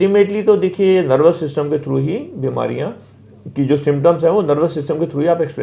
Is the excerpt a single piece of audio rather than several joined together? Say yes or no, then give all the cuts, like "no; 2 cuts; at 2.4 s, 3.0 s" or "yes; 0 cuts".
yes; 0 cuts